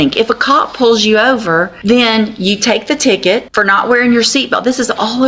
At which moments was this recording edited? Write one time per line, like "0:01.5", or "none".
0:01.7
0:03.5